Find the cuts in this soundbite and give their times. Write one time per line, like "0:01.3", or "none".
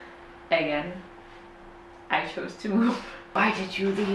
0:03.1